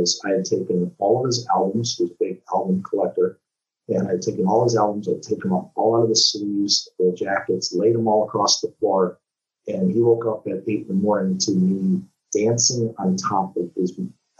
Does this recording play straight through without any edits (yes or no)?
yes